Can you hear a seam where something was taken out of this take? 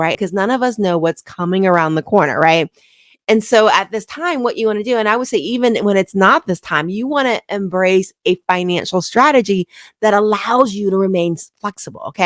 no; 0 cuts

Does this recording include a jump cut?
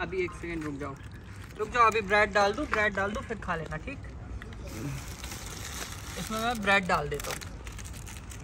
no; 0 cuts

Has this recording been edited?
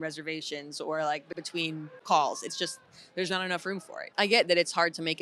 yes; 2 cuts; at 1.4 s, 4.1 s

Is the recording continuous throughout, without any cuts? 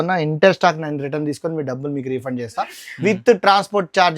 yes; 0 cuts

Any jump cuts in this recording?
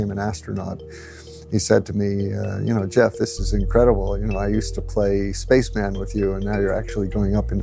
yes; 1 cut; at 1.0 s

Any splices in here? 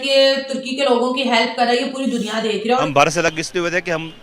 yes; 1 cut; at 2.8 s

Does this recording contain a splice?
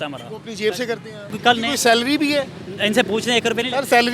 yes; 1 cut; at 1.3 s

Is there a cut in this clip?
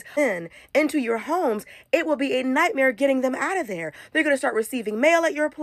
no; 0 cuts

